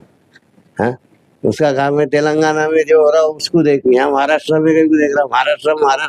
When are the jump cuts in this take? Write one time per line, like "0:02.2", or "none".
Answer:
none